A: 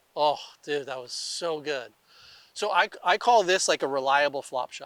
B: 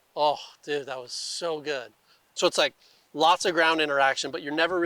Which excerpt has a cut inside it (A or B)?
B